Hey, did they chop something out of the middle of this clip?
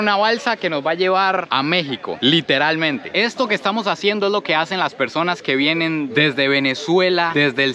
yes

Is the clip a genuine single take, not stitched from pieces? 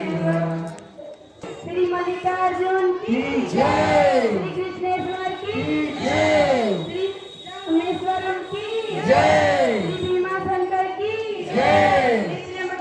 no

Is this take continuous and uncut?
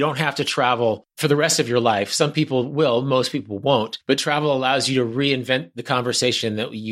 no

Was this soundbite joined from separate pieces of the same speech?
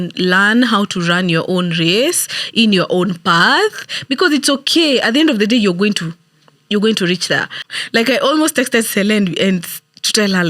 yes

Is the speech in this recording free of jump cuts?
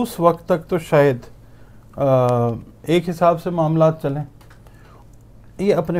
yes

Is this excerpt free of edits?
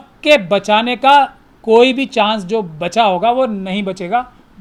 yes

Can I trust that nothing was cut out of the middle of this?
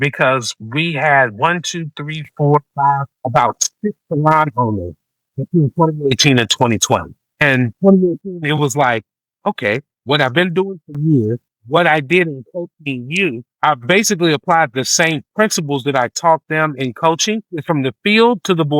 no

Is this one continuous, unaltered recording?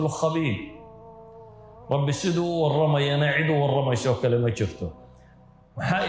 yes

